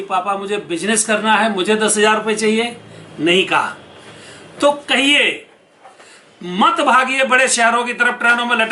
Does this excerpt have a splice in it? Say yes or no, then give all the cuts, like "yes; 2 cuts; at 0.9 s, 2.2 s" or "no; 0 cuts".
no; 0 cuts